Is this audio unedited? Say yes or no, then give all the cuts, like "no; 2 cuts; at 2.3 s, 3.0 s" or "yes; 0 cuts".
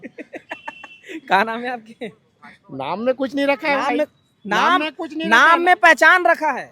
yes; 0 cuts